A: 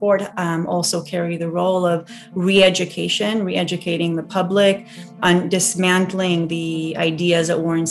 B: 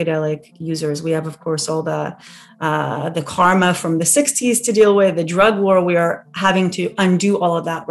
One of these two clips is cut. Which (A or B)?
A